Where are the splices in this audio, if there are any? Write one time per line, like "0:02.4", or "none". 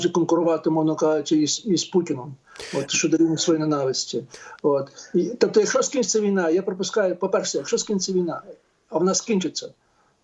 none